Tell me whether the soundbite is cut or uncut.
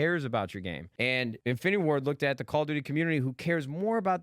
cut